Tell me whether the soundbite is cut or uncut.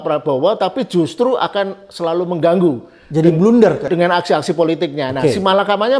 uncut